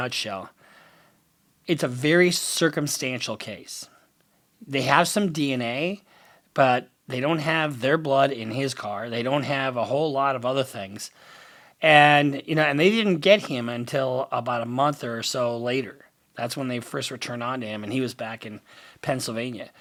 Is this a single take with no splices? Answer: yes; 0 cuts

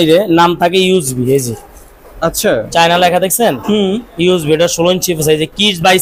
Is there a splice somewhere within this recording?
no; 0 cuts

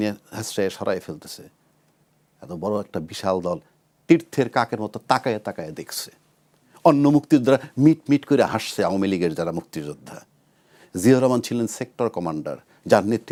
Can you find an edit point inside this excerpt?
no; 0 cuts

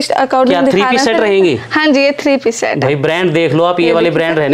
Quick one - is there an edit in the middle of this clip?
no; 0 cuts

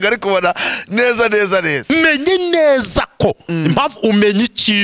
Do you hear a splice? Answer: yes; 1 cut; at 1.9 s

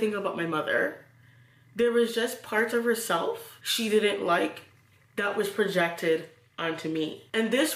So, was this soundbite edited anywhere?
no; 0 cuts

